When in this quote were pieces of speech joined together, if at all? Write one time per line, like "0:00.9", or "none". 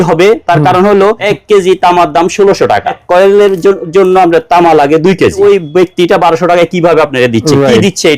0:01.3
0:03.0
0:05.4